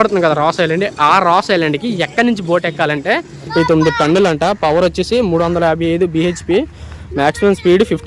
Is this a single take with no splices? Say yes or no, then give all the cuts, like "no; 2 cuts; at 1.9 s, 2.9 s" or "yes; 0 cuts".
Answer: no; 1 cut; at 3.5 s